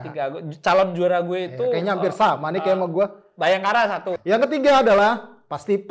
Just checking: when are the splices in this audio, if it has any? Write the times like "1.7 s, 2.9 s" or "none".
4.1 s